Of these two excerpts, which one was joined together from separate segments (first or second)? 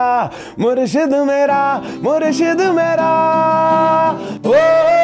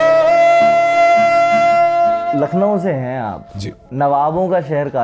second